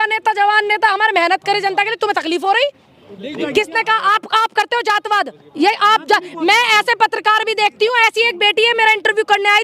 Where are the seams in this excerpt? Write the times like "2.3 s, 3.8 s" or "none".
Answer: 3.4 s